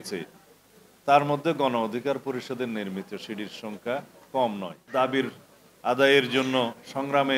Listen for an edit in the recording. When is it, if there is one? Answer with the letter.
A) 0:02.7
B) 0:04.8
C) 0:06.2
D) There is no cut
B